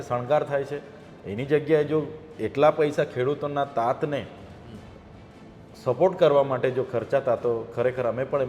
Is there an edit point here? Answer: no; 0 cuts

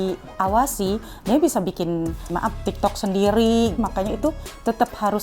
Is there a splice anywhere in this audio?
yes; 2 cuts; at 2.3 s, 3.8 s

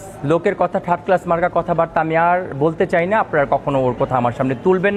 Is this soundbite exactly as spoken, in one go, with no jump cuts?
yes; 0 cuts

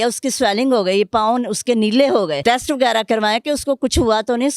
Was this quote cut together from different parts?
yes; 1 cut; at 2.4 s

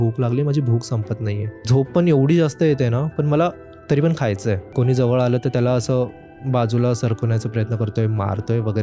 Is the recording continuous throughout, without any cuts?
no; 2 cuts; at 1.6 s, 4.6 s

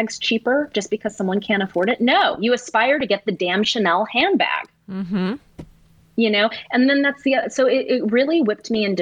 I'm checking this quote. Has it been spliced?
no; 0 cuts

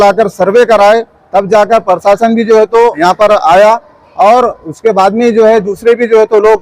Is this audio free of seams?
no; 1 cut; at 3.0 s

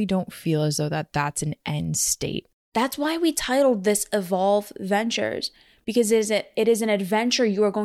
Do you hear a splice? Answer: yes; 1 cut; at 2.5 s

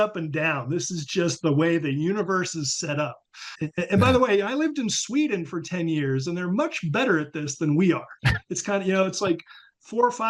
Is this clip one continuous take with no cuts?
no; 1 cut; at 3.5 s

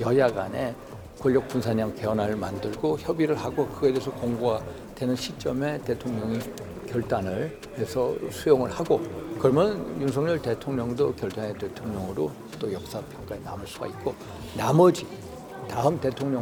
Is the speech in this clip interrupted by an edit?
no; 0 cuts

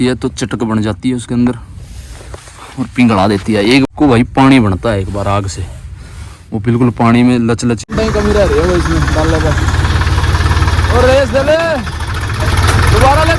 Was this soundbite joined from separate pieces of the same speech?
yes; 2 cuts; at 3.9 s, 7.9 s

